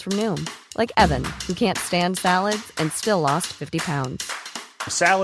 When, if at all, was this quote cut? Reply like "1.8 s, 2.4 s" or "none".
none